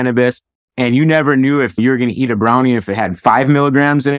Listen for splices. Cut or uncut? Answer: cut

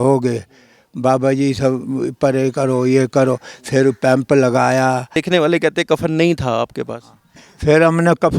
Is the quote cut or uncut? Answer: cut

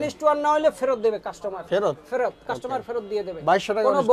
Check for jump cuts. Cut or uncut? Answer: uncut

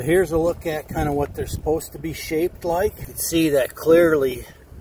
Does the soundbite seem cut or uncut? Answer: cut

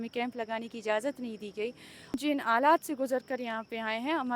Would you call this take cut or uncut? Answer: cut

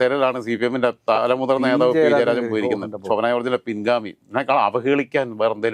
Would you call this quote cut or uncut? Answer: uncut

